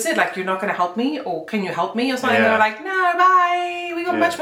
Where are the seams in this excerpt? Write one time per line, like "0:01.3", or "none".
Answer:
none